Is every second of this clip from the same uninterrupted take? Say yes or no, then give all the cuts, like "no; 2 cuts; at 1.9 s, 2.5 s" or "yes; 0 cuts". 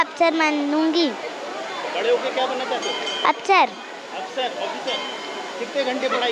yes; 0 cuts